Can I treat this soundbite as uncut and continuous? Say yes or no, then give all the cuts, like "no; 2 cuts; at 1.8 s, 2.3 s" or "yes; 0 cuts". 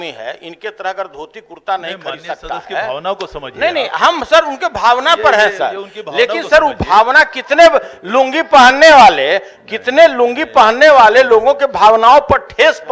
yes; 0 cuts